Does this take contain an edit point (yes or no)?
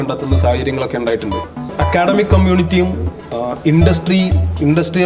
yes